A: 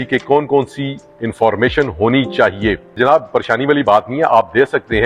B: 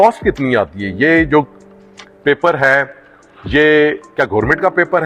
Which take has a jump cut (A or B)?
A